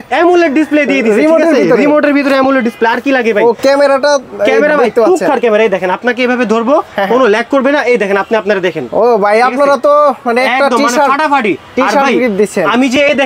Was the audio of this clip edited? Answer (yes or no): no